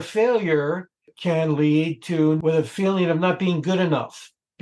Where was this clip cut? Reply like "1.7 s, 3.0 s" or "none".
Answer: 1.1 s, 2.4 s